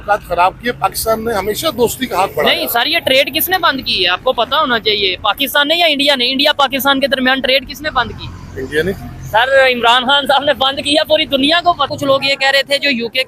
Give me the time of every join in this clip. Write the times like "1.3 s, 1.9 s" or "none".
11.9 s